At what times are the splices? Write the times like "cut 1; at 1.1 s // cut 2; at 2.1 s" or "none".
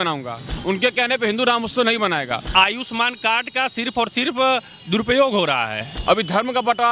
cut 1; at 2.5 s // cut 2; at 5.9 s